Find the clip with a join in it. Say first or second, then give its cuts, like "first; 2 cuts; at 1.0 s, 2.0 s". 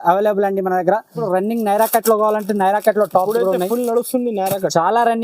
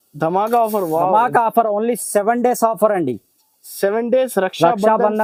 first; 1 cut; at 1.2 s